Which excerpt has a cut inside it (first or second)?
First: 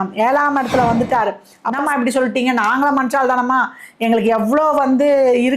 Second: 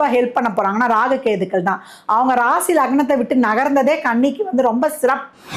first